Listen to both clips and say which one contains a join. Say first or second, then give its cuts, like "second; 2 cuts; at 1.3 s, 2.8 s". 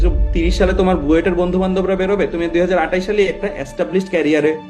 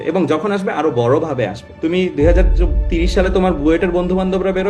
second; 1 cut; at 1.6 s